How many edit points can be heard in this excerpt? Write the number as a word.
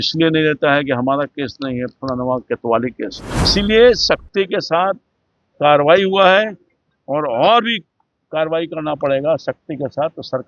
one